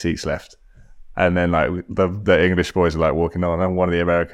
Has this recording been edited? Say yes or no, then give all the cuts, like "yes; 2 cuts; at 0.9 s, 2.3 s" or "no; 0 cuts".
no; 0 cuts